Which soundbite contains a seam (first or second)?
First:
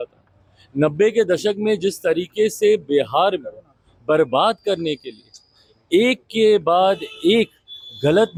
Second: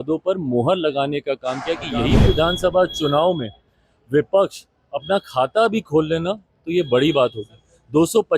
second